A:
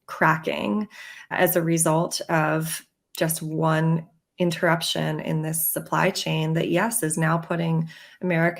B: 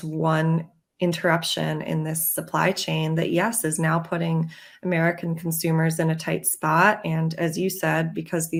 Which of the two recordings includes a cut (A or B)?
A